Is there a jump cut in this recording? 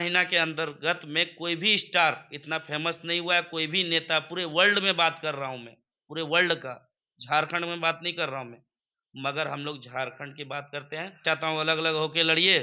yes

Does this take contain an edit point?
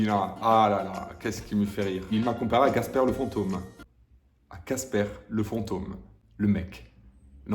yes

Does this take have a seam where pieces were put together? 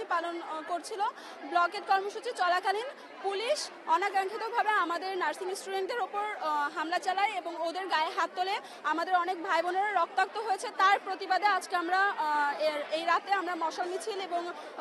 no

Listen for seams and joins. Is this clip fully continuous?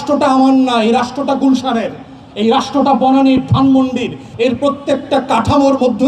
no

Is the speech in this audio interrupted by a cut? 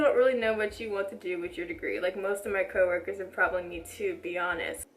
no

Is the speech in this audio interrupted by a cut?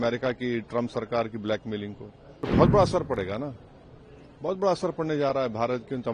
yes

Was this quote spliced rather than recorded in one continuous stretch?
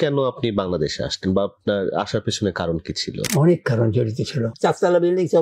yes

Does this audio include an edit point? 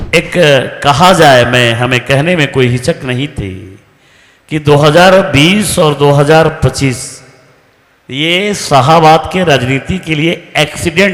no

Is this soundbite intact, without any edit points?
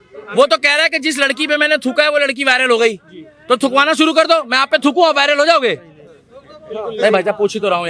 yes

